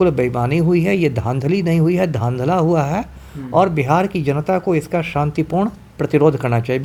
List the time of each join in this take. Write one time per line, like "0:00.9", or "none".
none